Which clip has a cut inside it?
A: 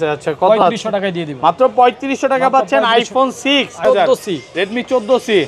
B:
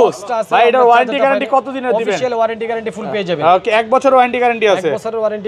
A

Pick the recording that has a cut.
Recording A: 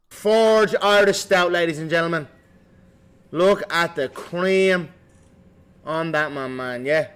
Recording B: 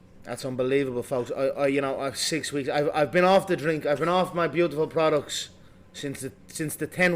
B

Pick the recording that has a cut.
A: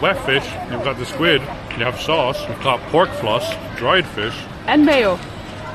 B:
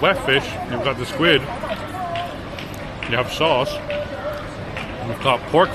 A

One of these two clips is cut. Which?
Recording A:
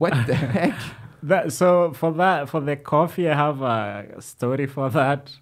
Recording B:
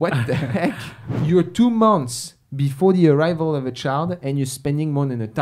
B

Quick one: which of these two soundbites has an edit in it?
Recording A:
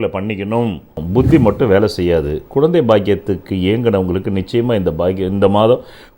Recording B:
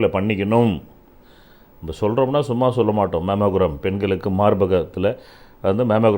A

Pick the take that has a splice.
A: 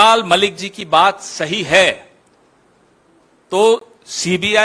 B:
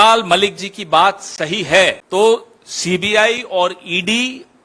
B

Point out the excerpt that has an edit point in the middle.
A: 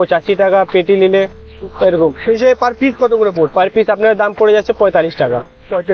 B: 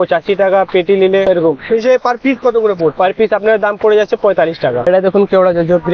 B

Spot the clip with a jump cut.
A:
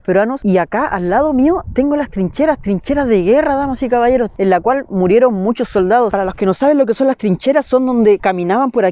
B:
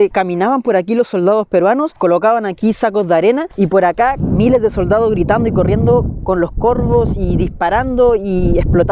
A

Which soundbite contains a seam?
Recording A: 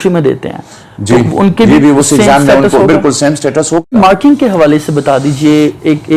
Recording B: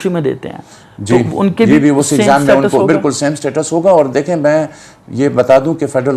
A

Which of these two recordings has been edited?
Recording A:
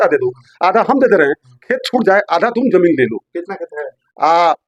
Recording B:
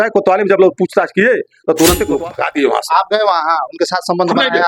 B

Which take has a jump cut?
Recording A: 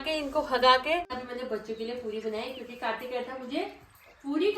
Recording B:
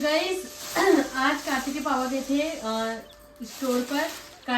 A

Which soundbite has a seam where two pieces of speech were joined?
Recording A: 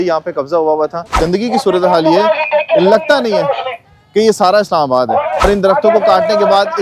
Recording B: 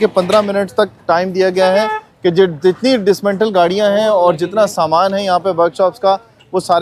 A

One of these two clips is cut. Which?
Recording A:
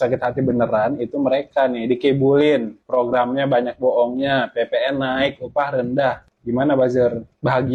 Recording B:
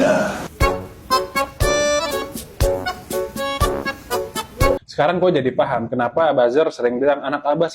B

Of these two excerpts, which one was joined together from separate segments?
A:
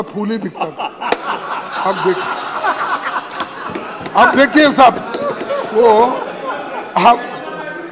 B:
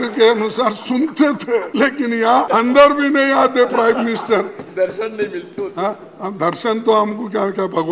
B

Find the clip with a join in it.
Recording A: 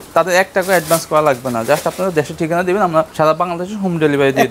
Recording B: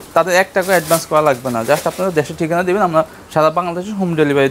A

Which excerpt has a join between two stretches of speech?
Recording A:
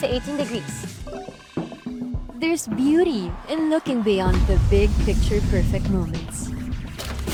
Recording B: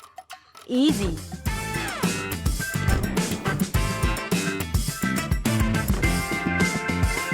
B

